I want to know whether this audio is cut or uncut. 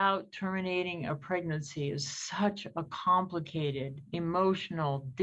uncut